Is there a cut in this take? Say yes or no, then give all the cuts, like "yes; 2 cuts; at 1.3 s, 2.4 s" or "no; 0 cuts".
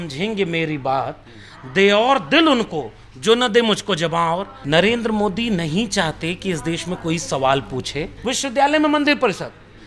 yes; 2 cuts; at 4.5 s, 8.1 s